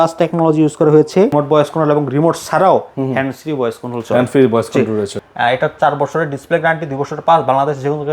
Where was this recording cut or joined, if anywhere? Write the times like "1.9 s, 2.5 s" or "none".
1.3 s, 5.1 s